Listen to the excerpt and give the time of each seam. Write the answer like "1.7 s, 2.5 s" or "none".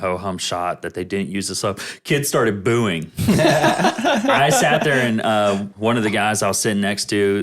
5.7 s

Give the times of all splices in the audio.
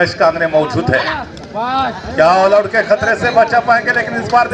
none

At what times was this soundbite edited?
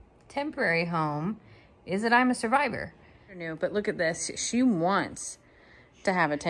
3.5 s

